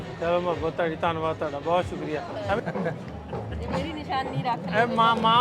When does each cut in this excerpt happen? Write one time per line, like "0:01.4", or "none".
0:02.6